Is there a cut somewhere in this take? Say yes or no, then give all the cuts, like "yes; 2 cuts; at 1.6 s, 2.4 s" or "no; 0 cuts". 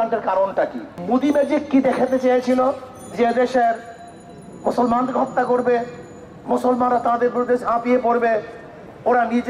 yes; 1 cut; at 0.9 s